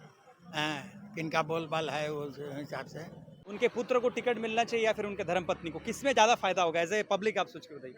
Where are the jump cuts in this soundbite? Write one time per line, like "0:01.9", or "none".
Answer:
0:03.4